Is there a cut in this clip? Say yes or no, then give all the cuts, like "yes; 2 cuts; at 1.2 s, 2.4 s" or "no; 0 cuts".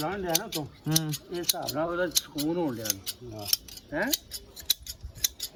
no; 0 cuts